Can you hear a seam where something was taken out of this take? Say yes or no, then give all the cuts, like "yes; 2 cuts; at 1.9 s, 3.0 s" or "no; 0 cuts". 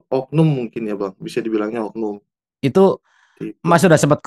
no; 0 cuts